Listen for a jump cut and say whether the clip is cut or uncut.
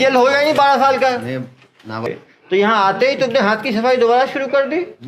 cut